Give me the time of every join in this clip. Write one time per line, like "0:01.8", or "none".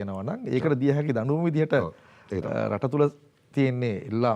none